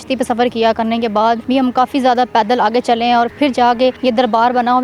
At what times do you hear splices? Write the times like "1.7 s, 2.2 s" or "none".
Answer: 1.4 s, 4.0 s